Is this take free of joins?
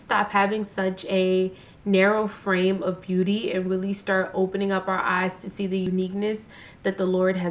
yes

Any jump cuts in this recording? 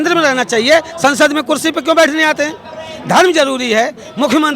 no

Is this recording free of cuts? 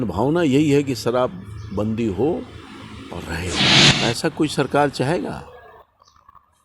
no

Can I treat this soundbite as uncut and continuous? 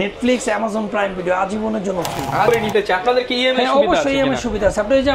no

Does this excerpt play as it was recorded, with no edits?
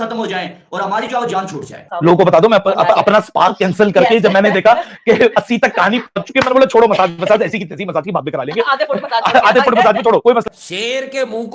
no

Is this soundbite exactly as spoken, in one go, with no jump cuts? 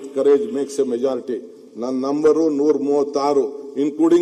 yes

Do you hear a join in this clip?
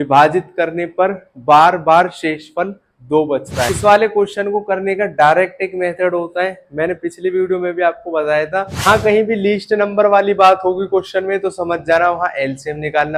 yes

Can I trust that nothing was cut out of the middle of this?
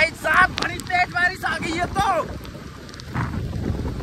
yes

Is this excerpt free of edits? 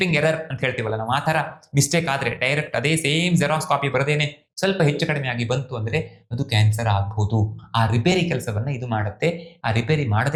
yes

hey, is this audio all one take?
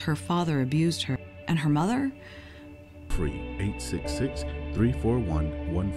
no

